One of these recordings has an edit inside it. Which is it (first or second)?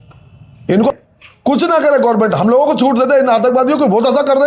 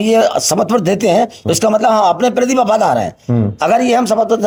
first